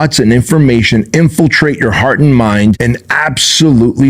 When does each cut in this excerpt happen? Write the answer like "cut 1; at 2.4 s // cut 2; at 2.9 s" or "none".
cut 1; at 2.8 s